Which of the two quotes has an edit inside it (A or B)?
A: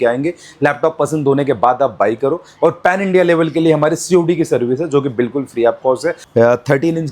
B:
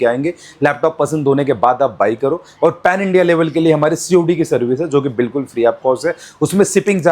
A